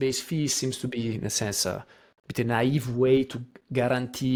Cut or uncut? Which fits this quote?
uncut